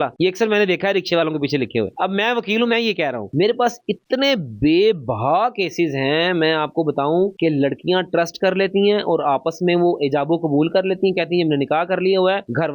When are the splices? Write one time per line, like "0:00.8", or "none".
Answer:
none